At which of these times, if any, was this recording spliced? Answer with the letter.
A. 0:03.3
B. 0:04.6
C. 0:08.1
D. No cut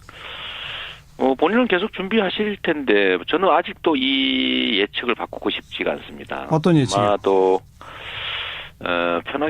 B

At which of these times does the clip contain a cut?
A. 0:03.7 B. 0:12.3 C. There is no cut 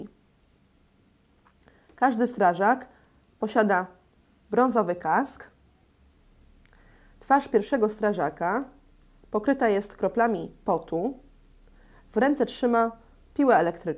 A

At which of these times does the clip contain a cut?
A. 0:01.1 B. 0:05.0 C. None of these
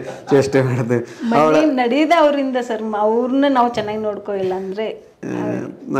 C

